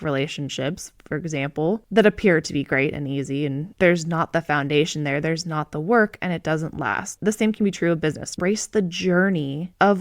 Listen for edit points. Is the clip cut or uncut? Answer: cut